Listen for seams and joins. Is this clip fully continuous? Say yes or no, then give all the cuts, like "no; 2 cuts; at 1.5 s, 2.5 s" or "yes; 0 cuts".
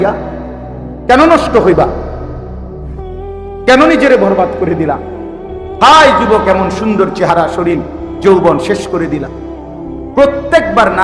yes; 0 cuts